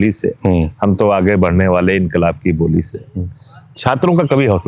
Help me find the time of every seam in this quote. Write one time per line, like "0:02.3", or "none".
none